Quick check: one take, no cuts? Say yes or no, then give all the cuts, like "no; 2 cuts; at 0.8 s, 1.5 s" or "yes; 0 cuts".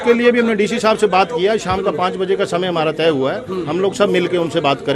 yes; 0 cuts